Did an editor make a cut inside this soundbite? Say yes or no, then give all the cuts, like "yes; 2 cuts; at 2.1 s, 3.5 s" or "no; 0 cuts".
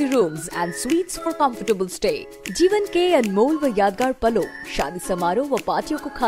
no; 0 cuts